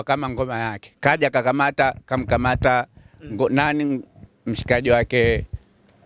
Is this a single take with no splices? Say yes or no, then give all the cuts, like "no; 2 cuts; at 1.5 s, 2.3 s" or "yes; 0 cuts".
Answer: yes; 0 cuts